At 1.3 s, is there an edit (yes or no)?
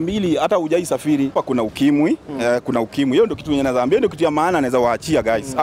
yes